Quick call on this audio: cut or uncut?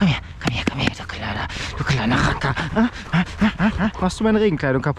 uncut